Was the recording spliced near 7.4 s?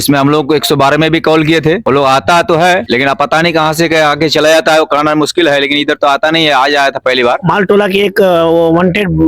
yes; 1 cut; at 7.4 s

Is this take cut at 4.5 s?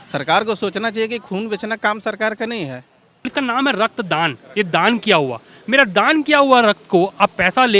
no; 1 cut; at 3.3 s

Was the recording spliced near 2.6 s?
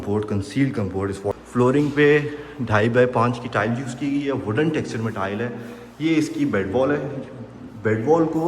no; 1 cut; at 1.4 s

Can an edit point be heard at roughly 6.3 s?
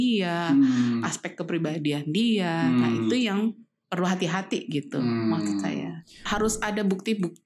yes; 1 cut; at 6.3 s

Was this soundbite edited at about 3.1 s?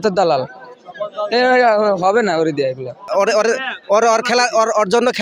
yes; 1 cut; at 3.1 s

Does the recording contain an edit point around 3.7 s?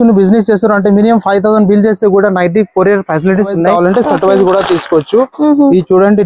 yes; 1 cut; at 3.7 s

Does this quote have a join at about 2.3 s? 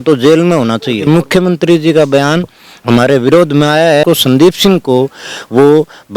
no; 2 cuts; at 1.1 s, 4.0 s

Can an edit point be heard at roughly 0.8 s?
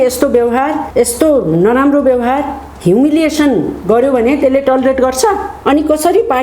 yes; 2 cuts; at 0.8 s, 5.5 s

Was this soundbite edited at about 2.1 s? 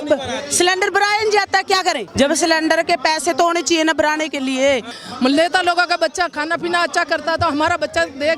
yes; 2 cuts; at 2.1 s, 5.0 s

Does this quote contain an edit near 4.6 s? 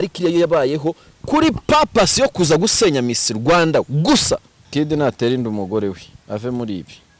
yes; 1 cut; at 4.6 s

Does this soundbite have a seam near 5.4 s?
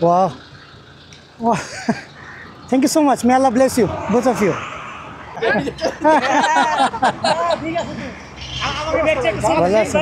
yes; 1 cut; at 5.4 s

